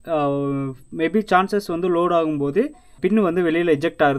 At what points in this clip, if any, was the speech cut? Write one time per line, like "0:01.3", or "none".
0:03.0

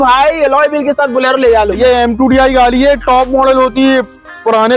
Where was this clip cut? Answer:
0:01.8

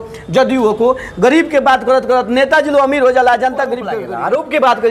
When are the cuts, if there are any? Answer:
0:04.0

